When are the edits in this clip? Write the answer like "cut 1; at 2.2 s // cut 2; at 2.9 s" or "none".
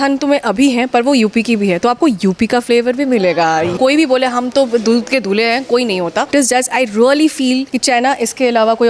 cut 1; at 3.8 s // cut 2; at 6.3 s // cut 3; at 7.7 s